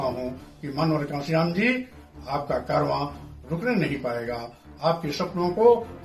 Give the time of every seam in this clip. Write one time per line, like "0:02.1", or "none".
none